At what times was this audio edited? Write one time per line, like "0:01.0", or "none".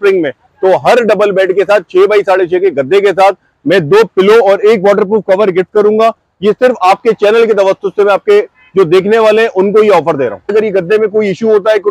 0:10.5

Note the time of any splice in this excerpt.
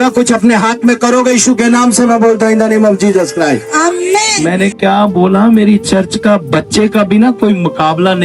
0:04.4

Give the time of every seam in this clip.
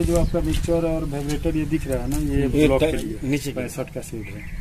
0:03.5

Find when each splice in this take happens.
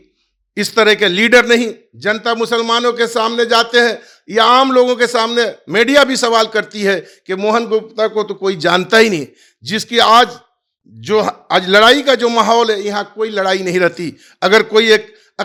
none

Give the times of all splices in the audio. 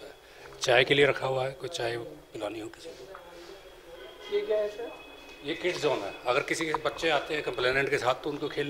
none

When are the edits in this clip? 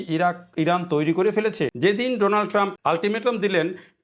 0:01.7
0:02.7

